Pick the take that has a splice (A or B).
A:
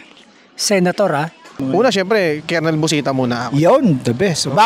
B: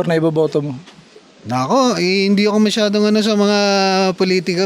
A